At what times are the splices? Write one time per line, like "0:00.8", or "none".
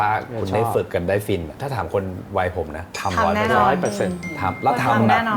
0:01.6